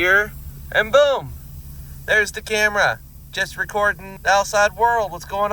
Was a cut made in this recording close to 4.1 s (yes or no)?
yes